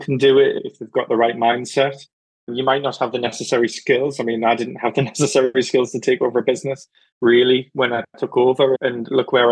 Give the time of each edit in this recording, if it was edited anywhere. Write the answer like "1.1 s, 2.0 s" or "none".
none